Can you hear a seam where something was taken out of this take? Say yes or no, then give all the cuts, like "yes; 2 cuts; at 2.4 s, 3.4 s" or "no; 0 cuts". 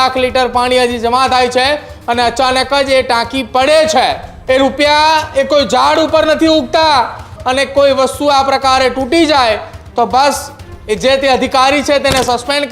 yes; 2 cuts; at 4.3 s, 7.3 s